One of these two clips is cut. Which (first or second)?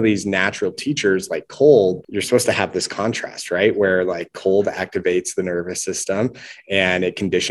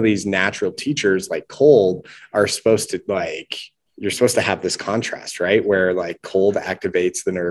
first